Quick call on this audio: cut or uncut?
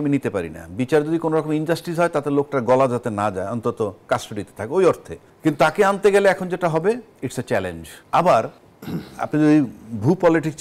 uncut